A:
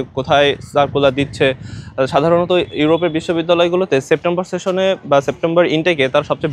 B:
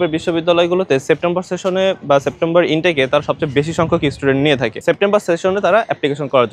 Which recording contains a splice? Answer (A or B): B